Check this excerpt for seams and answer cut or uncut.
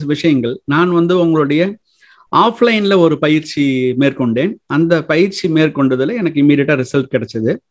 uncut